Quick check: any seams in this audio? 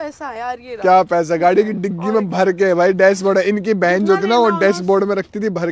no; 0 cuts

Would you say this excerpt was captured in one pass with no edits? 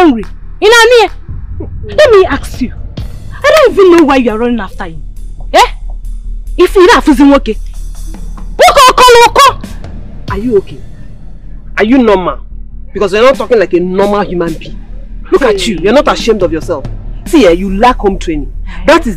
yes; 0 cuts

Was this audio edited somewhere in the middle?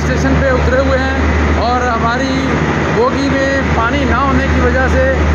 no; 0 cuts

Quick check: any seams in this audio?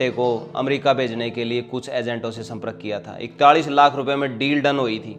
no; 0 cuts

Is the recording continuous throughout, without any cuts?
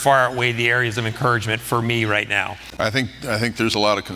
no; 1 cut; at 2.6 s

